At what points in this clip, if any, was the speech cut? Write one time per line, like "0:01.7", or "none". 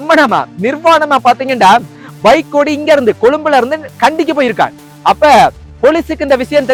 none